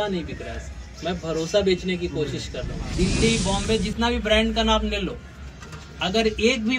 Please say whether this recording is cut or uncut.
cut